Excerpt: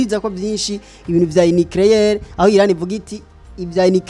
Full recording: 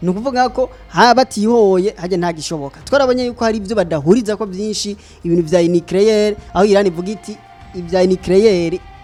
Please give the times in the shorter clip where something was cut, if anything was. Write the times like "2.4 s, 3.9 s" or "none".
none